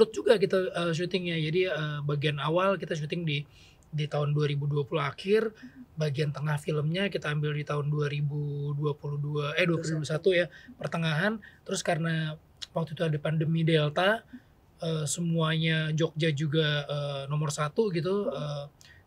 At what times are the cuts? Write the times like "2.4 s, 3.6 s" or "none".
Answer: none